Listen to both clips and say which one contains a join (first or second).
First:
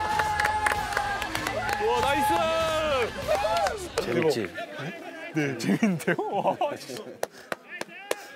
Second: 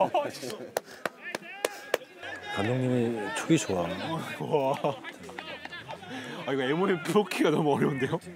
first